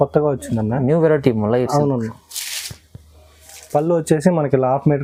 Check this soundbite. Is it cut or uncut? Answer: uncut